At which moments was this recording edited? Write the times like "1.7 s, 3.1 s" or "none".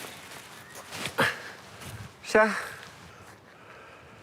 3.1 s